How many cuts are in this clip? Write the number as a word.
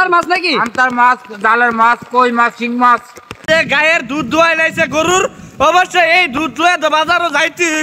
one